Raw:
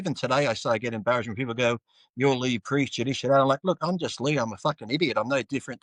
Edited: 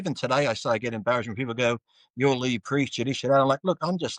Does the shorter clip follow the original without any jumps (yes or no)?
yes